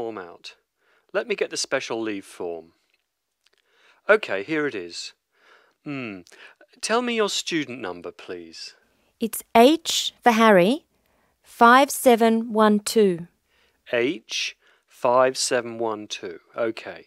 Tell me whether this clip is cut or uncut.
uncut